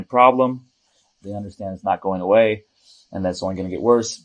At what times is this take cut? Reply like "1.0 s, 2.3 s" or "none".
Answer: none

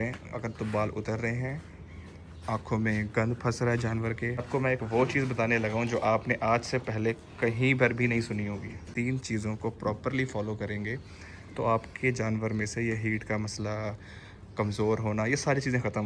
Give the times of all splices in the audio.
4.4 s, 8.8 s

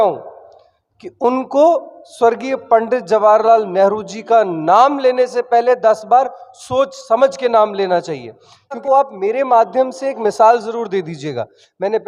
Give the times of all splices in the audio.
8.8 s

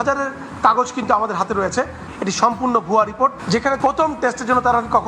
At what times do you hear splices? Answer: 2.0 s

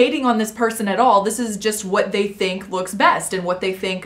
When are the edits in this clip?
none

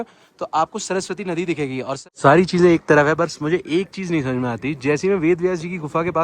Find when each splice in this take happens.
2.0 s

